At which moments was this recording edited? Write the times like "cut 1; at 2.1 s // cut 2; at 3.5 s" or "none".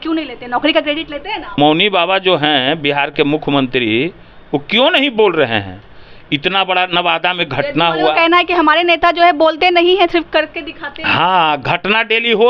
cut 1; at 1.6 s